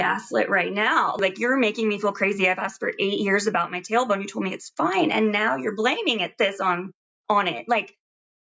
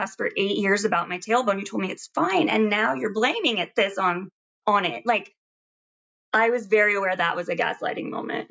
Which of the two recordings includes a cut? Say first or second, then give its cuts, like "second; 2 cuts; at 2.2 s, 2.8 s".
first; 1 cut; at 1.2 s